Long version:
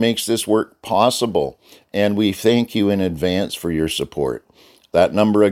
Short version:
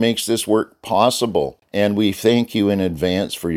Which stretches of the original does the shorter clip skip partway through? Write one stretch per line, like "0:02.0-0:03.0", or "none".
0:01.6-0:01.8